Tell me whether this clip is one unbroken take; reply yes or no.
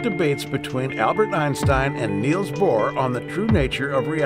no